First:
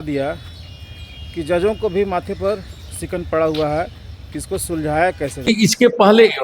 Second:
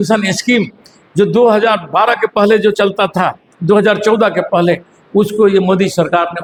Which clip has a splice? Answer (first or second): first